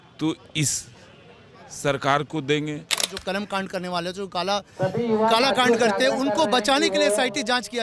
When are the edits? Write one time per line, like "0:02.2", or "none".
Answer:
0:03.1